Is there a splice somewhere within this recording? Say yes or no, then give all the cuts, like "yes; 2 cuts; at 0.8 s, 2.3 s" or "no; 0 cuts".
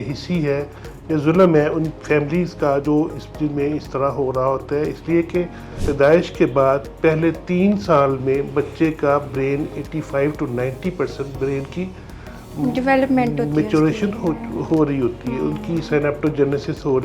yes; 1 cut; at 5.8 s